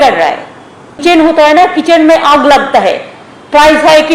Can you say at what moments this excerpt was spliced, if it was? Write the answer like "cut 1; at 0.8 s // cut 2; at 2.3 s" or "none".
cut 1; at 1.0 s